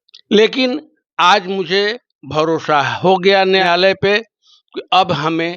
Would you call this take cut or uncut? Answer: cut